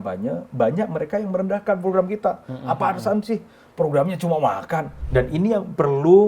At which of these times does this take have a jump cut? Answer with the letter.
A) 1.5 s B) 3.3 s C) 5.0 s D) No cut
C